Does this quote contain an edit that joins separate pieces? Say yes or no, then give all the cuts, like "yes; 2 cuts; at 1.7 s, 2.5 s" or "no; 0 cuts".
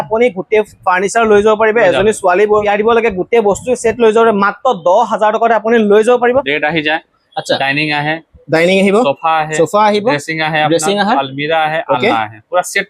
yes; 2 cuts; at 2.7 s, 6.5 s